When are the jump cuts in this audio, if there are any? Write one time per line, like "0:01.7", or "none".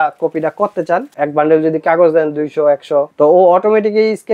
0:01.1
0:03.1